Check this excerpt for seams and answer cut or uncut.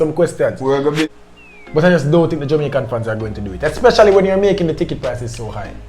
cut